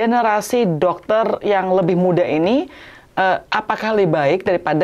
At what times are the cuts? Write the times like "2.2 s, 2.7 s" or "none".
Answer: none

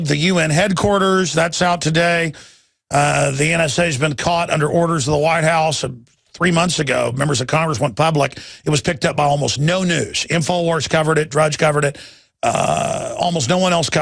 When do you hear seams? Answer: 13.0 s

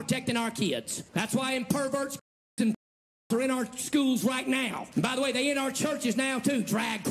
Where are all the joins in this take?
1.0 s, 4.8 s

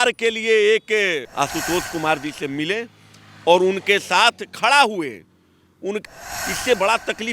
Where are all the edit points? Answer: 1.3 s, 6.0 s

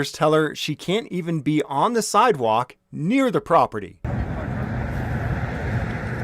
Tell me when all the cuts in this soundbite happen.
3.8 s

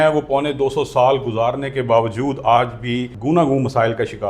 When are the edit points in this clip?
3.1 s

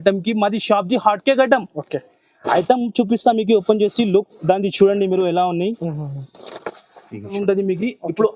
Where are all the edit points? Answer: 7.3 s

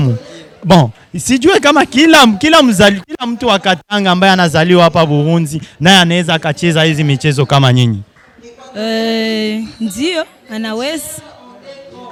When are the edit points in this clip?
none

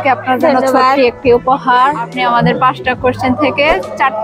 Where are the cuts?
2.1 s

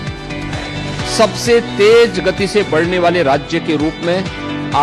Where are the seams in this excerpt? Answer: 0.9 s

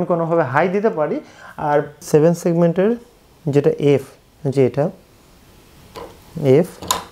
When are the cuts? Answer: 2.0 s

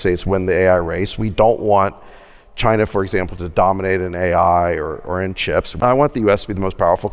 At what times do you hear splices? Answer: 5.7 s

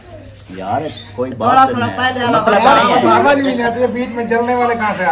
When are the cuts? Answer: none

